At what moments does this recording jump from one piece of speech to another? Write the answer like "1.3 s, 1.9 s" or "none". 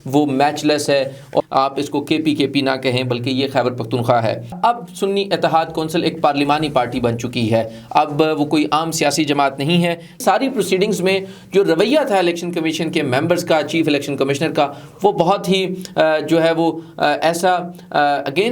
1.4 s, 4.5 s, 10.2 s